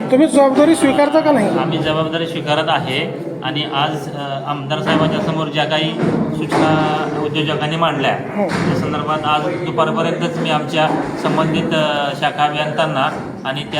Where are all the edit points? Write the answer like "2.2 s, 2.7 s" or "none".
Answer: none